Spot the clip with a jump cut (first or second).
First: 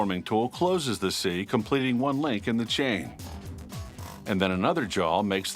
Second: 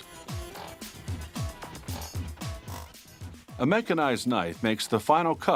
first